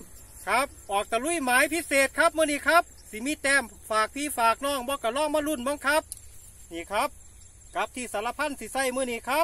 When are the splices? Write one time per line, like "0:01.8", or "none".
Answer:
none